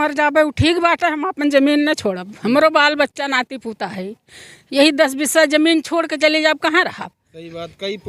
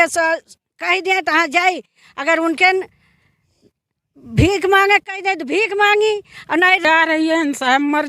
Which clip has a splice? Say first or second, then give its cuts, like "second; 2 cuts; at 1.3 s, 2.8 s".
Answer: second; 1 cut; at 6.8 s